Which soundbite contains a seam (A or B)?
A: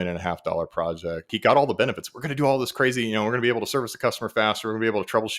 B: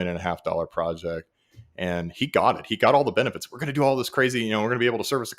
A